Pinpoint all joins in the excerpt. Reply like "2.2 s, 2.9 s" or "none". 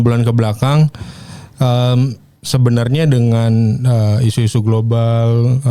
none

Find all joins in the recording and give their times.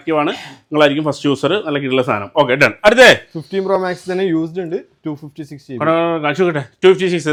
none

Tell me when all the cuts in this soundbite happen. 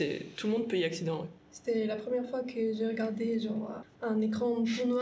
1.5 s, 3.8 s

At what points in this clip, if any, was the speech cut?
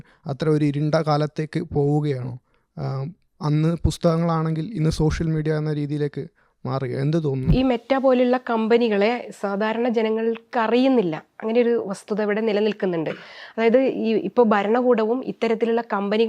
7.5 s

